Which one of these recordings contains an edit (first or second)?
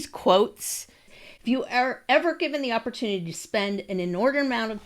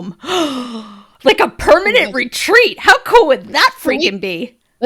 first